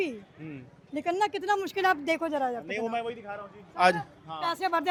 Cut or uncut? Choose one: uncut